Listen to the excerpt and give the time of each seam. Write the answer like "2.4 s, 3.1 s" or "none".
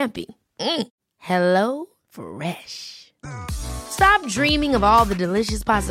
none